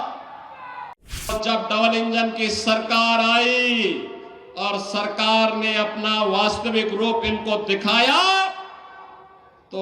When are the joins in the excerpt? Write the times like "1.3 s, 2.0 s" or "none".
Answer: 1.3 s